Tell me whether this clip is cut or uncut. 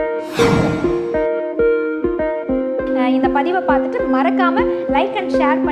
uncut